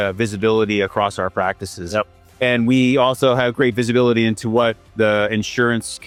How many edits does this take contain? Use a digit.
0